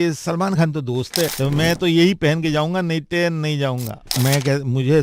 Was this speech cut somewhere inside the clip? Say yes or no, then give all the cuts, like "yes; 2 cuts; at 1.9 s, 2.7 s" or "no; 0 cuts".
yes; 2 cuts; at 1.3 s, 4.2 s